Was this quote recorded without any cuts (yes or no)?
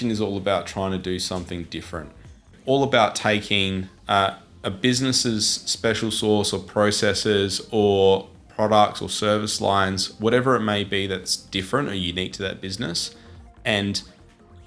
yes